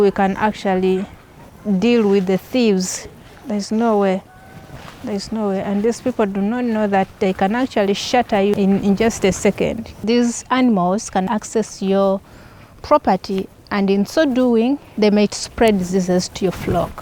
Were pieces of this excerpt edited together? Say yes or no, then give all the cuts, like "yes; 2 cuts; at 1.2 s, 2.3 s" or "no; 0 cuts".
yes; 4 cuts; at 8.5 s, 10.0 s, 11.3 s, 14.9 s